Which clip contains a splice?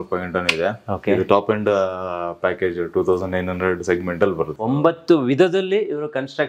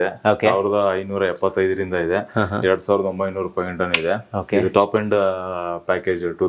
first; 1 cut; at 4.5 s

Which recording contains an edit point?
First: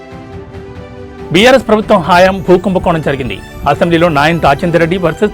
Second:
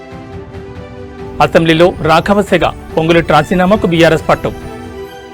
second; 1 cut; at 1.2 s

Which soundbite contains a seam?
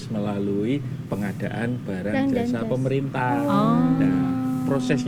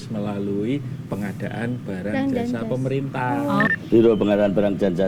second; 1 cut; at 3.7 s

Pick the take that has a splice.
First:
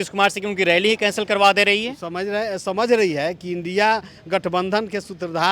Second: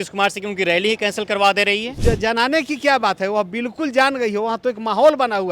second; 1 cut; at 2.0 s

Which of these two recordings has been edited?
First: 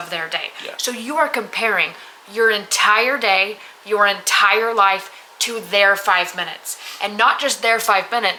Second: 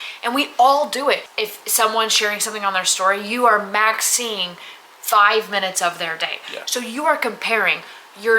second; 1 cut; at 1.3 s

